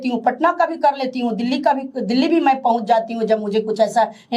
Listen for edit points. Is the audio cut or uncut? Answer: uncut